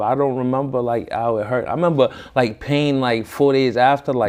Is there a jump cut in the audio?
no; 0 cuts

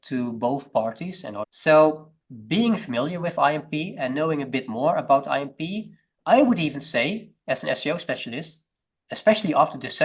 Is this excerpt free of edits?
no; 2 cuts; at 1.5 s, 2.1 s

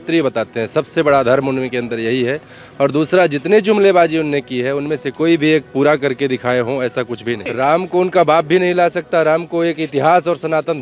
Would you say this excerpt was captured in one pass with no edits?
no; 1 cut; at 7.5 s

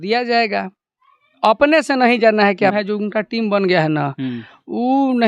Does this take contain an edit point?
yes; 1 cut; at 2.7 s

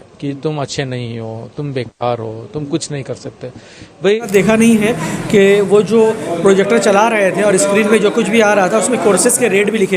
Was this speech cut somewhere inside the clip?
yes; 1 cut; at 4.3 s

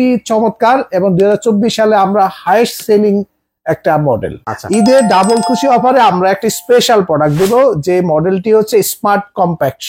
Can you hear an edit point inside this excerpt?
yes; 1 cut; at 4.4 s

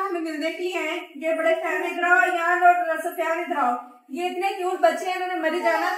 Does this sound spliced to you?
no; 0 cuts

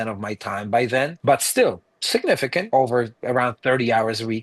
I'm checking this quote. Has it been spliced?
yes; 2 cuts; at 1.2 s, 2.7 s

